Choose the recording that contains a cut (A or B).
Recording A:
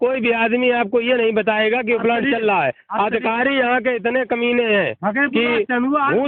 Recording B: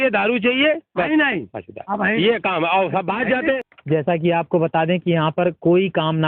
B